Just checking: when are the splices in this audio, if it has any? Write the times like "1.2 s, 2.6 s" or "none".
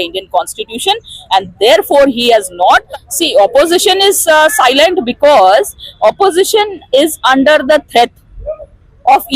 2.9 s